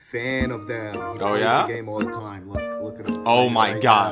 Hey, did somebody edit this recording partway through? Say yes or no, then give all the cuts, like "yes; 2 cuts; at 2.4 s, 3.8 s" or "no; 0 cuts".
no; 0 cuts